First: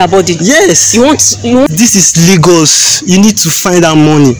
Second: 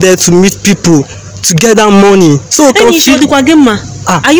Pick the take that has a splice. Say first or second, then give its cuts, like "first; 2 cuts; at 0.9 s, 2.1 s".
first; 1 cut; at 1.7 s